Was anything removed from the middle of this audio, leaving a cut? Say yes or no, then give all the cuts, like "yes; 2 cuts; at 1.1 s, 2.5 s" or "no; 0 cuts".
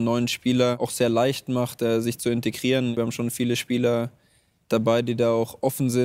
yes; 2 cuts; at 0.8 s, 3.0 s